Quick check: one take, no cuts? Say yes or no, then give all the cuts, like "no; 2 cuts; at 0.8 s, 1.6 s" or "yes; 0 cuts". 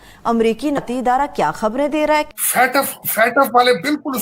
no; 1 cut; at 2.3 s